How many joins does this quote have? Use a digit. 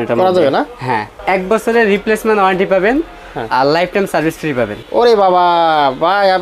2